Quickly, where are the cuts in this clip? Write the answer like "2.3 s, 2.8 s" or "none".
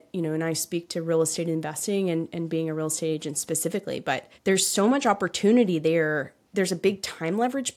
4.3 s, 6.4 s